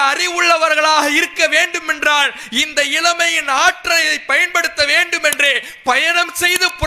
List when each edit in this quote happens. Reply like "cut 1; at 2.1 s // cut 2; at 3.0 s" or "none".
none